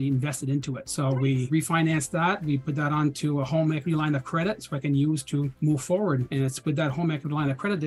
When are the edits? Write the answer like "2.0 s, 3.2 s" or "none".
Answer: 1.2 s, 5.5 s, 6.3 s